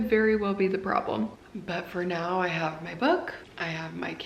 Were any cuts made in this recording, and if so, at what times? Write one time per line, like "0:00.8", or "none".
0:01.4